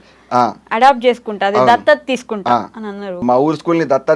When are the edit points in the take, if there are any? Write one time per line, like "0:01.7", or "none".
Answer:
0:03.2